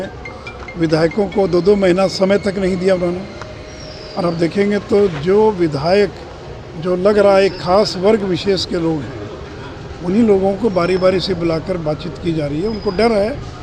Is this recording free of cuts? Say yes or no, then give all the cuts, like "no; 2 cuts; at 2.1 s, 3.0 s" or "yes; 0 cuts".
yes; 0 cuts